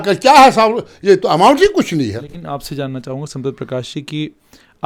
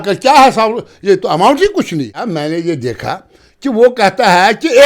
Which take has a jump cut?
second; 1 cut; at 2.2 s

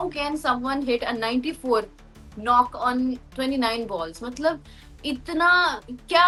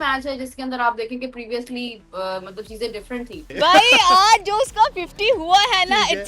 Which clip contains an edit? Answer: second; 1 cut; at 3.5 s

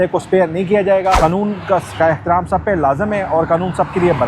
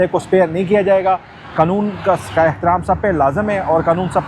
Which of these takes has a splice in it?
first; 1 cut; at 1.2 s

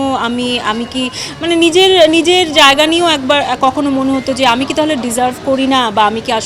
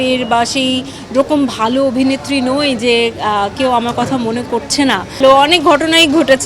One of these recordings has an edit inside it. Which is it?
second; 1 cut; at 5.2 s

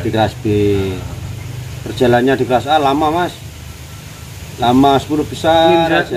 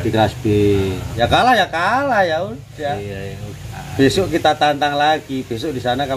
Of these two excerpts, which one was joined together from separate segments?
second; 1 cut; at 1.0 s

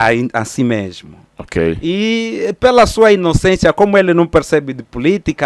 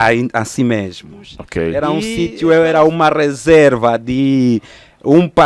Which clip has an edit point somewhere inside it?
second; 1 cut; at 1.9 s

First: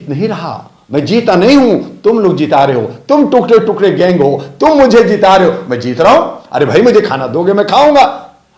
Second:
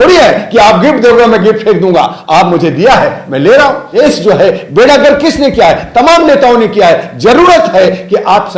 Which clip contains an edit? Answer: second; 1 cut; at 3.8 s

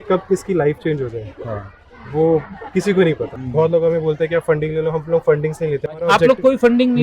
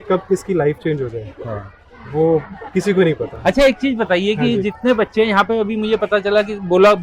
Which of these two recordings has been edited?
first; 2 cuts; at 3.3 s, 6.1 s

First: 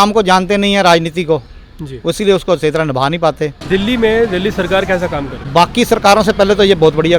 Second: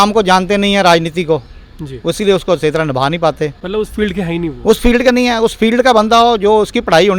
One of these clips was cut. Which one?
first; 2 cuts; at 3.6 s, 5.4 s

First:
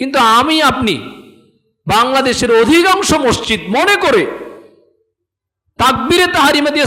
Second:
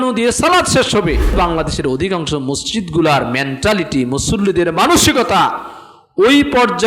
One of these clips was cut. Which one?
second; 1 cut; at 1.3 s

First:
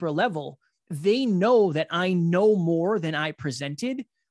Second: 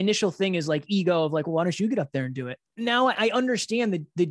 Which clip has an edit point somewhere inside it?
second; 1 cut; at 2.5 s

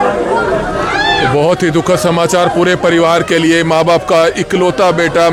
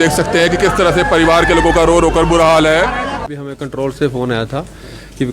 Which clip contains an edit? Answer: second; 1 cut; at 3.2 s

